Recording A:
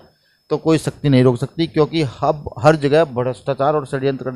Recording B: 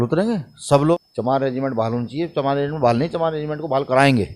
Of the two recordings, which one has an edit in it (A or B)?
B